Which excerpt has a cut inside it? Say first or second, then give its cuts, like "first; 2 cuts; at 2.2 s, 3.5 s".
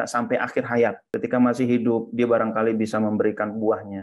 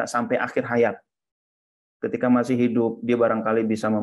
first; 1 cut; at 1.0 s